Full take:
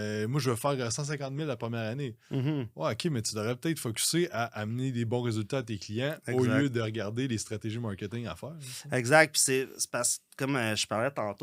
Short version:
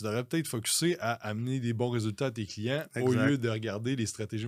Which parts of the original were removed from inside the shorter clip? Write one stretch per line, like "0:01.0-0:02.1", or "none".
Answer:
none